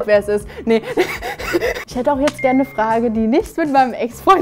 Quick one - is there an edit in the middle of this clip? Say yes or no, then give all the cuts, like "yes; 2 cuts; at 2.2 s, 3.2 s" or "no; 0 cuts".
yes; 1 cut; at 1.8 s